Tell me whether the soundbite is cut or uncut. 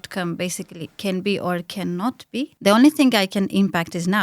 cut